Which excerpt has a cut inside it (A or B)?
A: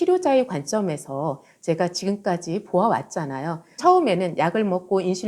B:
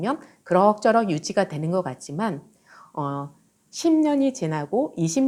A